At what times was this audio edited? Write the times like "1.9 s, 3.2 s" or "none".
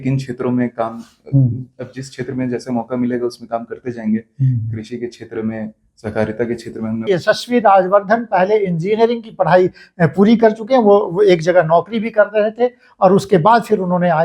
7.0 s